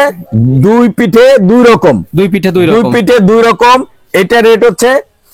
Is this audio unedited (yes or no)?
yes